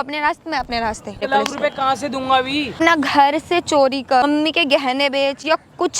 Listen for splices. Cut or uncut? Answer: cut